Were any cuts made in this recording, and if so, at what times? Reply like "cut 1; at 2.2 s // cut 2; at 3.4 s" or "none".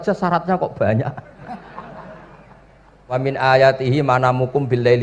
cut 1; at 3.2 s